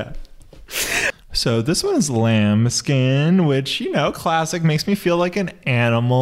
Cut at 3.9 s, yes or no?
no